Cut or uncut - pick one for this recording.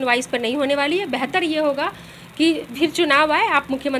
uncut